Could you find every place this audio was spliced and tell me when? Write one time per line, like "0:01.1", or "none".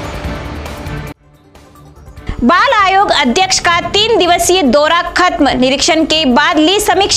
0:02.0